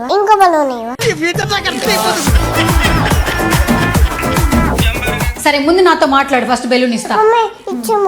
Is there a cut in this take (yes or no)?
yes